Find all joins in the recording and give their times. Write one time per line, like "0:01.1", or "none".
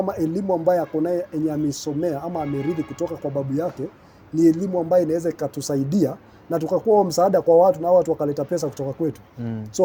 none